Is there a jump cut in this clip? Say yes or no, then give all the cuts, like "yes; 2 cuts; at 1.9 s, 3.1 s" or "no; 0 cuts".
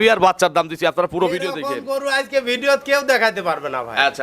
no; 0 cuts